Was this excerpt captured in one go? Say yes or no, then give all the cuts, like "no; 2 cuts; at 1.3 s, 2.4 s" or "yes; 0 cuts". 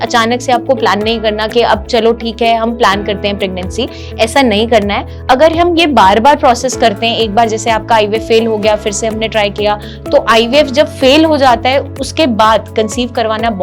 no; 2 cuts; at 5.2 s, 9.9 s